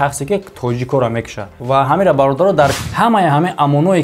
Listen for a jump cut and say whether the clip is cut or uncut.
cut